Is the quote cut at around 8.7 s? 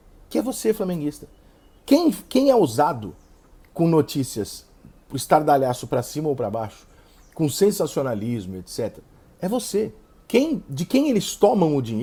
no; 0 cuts

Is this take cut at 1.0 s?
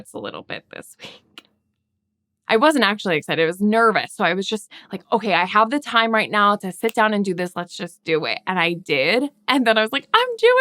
no; 1 cut; at 2.3 s

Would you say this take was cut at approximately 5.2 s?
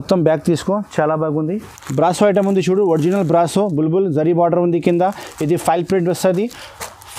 no; 1 cut; at 1.7 s

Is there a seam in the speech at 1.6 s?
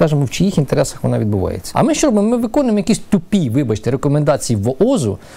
yes; 1 cut; at 1.6 s

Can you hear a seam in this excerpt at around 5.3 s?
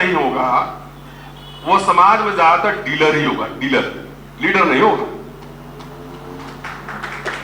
no; 0 cuts

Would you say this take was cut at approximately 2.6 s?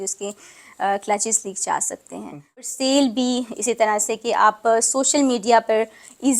yes; 1 cut; at 2.6 s

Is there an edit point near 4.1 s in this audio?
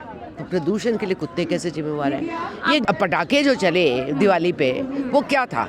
no; 1 cut; at 2.8 s

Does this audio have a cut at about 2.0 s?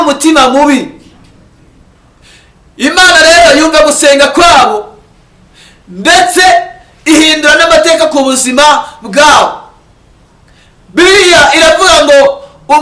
yes; 1 cut; at 2.0 s

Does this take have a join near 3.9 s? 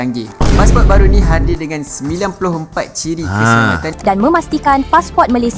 yes; 1 cut; at 3.9 s

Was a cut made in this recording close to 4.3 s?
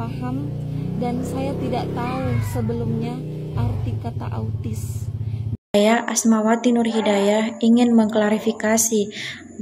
no; 1 cut; at 5.6 s

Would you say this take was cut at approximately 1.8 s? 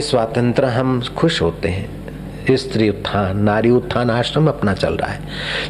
no; 0 cuts

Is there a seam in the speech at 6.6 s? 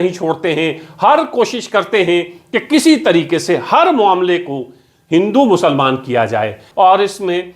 yes; 1 cut; at 6.6 s

